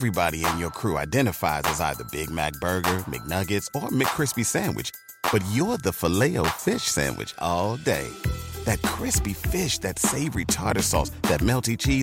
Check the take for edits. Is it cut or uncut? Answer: uncut